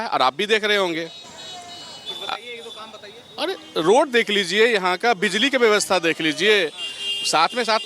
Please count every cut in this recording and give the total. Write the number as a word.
zero